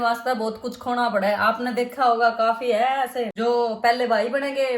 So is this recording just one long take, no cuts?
yes; 0 cuts

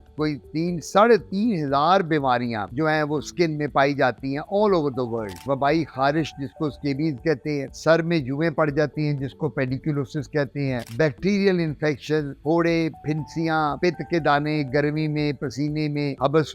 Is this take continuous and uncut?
no; 1 cut; at 5.4 s

